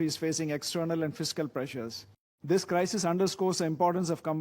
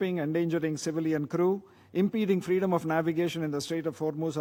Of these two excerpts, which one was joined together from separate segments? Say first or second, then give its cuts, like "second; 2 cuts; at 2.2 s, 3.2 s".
first; 1 cut; at 2.3 s